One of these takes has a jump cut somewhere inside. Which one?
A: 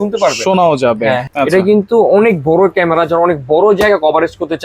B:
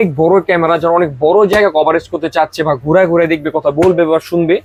A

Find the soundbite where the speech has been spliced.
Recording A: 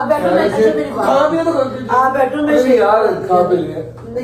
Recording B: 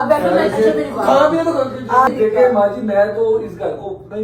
B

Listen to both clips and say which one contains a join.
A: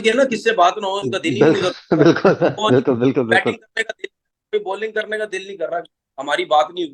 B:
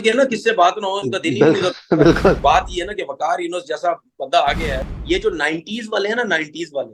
B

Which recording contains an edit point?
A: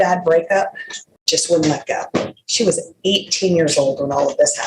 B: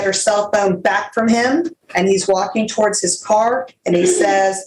B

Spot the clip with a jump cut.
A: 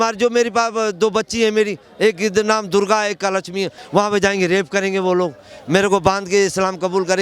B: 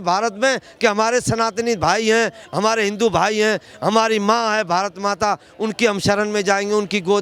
A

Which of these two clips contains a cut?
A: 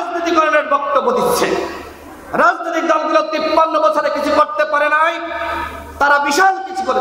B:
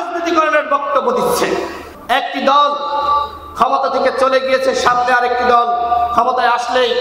B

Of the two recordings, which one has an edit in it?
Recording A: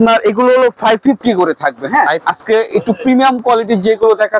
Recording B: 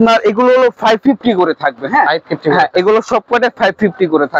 A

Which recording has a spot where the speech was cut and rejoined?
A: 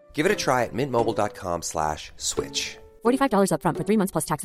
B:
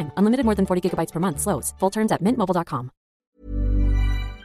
B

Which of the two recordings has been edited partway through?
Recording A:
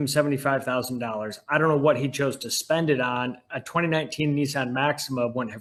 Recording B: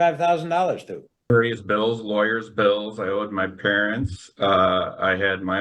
B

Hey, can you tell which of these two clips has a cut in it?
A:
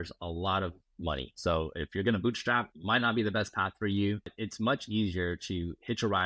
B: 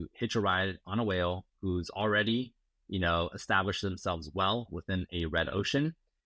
A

